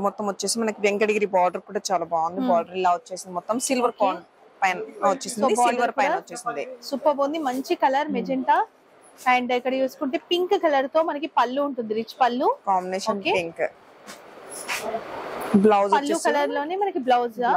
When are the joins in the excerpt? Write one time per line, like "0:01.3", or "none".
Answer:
none